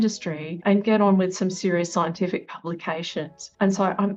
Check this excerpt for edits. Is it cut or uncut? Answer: uncut